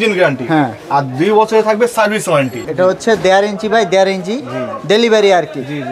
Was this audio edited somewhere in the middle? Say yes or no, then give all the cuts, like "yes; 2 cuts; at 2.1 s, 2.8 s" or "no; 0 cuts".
yes; 1 cut; at 2.6 s